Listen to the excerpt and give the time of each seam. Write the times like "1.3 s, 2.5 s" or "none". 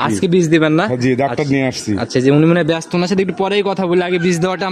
none